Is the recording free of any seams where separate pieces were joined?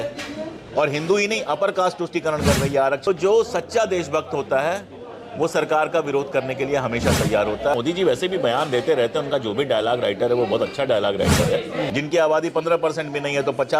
no; 3 cuts; at 3.1 s, 7.7 s, 11.9 s

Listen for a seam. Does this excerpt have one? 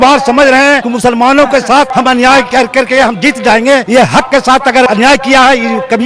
yes; 4 cuts; at 0.9 s, 1.9 s, 3.9 s, 4.9 s

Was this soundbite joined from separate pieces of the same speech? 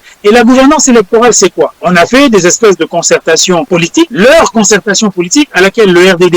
yes; 3 cuts; at 1.8 s, 3.8 s, 5.5 s

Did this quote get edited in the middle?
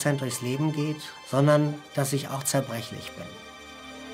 yes; 1 cut; at 1.1 s

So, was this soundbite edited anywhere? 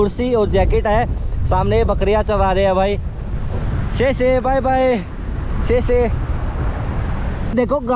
no; 0 cuts

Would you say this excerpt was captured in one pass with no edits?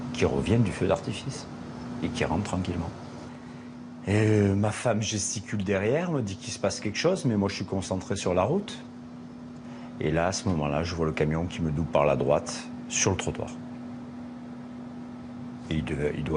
no; 1 cut; at 14.2 s

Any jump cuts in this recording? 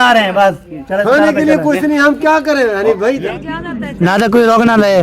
yes; 1 cut; at 3.2 s

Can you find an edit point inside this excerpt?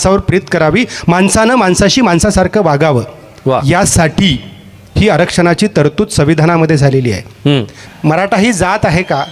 yes; 1 cut; at 7.8 s

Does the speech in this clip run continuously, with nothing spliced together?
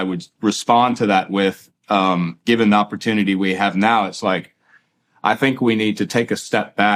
yes; 0 cuts

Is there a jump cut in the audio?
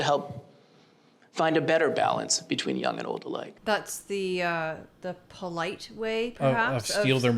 yes; 1 cut; at 3.5 s

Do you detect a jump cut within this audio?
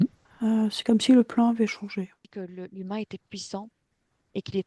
yes; 1 cut; at 2.3 s

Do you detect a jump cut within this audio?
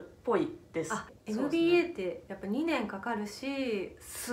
yes; 1 cut; at 1.0 s

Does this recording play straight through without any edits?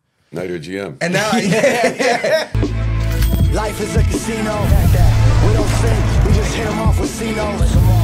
no; 1 cut; at 2.5 s

